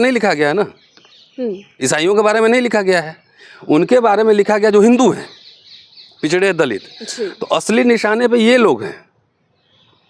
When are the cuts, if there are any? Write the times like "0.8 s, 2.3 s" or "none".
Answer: none